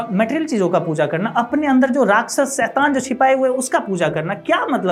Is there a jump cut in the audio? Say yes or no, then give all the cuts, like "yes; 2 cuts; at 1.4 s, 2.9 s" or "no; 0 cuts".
no; 0 cuts